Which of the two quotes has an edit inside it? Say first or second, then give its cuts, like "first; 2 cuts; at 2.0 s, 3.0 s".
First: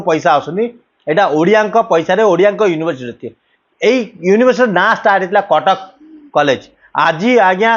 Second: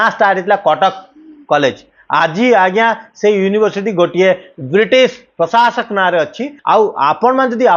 second; 1 cut; at 6.5 s